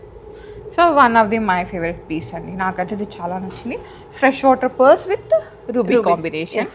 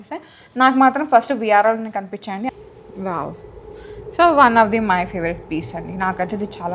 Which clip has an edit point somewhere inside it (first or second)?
second